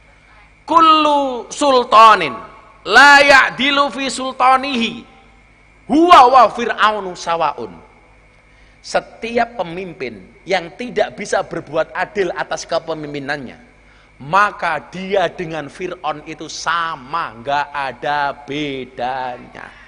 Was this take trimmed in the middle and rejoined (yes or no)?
no